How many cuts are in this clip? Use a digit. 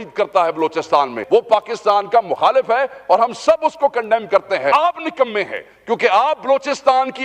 2